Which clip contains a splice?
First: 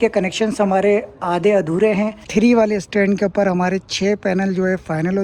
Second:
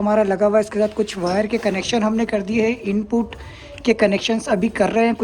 first; 1 cut; at 2.2 s

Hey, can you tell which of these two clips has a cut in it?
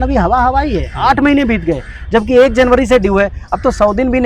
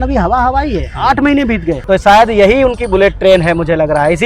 second; 1 cut; at 1.8 s

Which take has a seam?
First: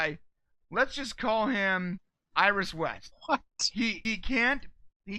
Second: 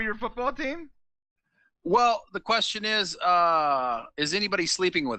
first; 3 cuts; at 2.1 s, 3.1 s, 4.1 s

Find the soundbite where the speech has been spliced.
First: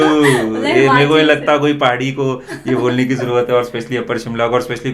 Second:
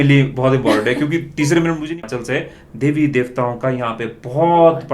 second; 1 cut; at 1.8 s

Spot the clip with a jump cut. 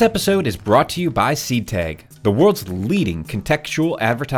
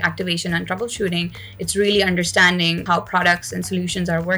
second; 1 cut; at 2.8 s

